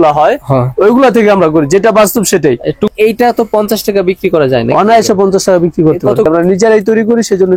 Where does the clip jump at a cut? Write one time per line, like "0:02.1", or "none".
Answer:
0:02.9
0:06.2